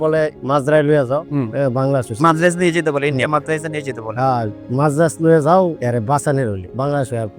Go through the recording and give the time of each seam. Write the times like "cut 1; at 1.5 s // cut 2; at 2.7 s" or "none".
none